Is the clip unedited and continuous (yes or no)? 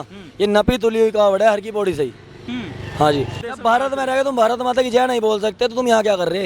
no